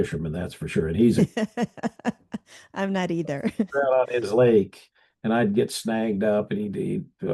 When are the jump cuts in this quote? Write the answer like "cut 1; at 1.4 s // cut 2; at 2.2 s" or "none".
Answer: none